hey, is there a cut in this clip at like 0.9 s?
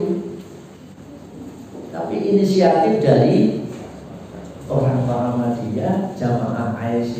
yes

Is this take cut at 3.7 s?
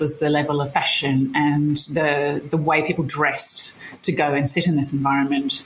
no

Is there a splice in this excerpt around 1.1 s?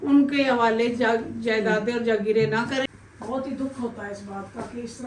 no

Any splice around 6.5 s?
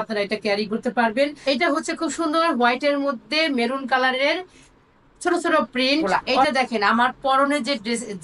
yes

